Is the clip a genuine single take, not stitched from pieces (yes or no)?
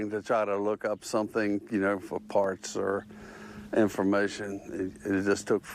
yes